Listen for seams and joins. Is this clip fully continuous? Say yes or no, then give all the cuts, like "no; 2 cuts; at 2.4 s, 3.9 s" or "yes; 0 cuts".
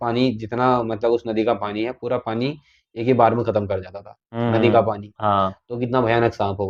yes; 0 cuts